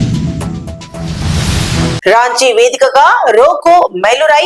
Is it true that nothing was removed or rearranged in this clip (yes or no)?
no